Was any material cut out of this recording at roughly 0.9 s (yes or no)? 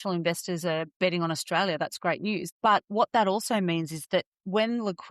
yes